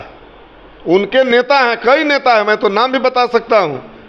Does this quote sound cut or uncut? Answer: uncut